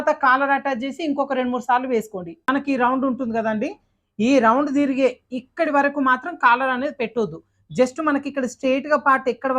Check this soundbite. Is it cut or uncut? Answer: cut